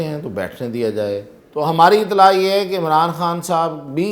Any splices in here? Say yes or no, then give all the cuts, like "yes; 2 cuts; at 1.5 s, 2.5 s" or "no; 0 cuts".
yes; 1 cut; at 1.4 s